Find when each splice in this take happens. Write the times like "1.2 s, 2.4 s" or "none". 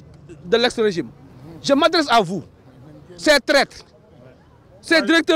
none

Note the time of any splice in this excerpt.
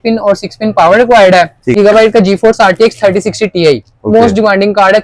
1.6 s

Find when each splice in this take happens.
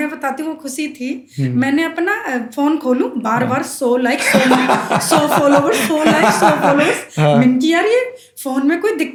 none

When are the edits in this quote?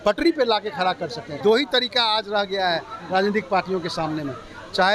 1.4 s

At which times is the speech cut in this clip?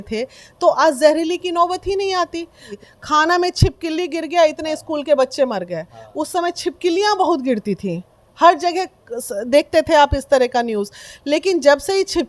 2.8 s

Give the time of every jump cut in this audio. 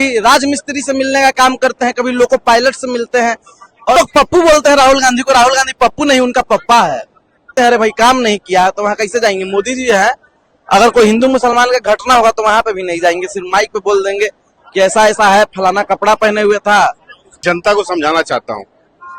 4.0 s, 7.5 s, 17.4 s

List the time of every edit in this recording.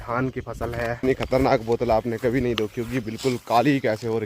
1.0 s

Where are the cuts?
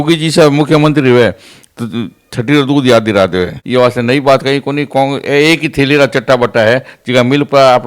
3.6 s

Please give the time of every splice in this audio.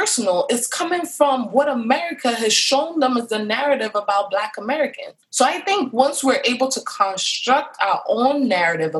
none

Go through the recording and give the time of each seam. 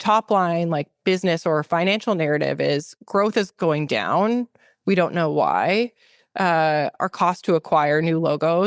none

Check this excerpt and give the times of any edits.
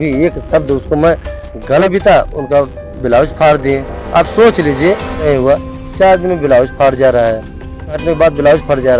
1.9 s, 5.2 s, 8.0 s

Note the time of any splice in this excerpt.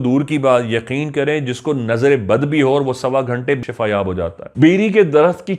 3.6 s

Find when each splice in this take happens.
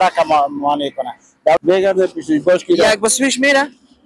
1.6 s

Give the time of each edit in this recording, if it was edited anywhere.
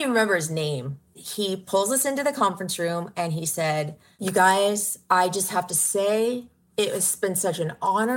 1.2 s, 4.0 s

